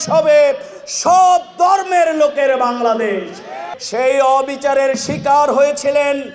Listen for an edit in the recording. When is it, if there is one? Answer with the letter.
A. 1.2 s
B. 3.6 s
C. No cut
B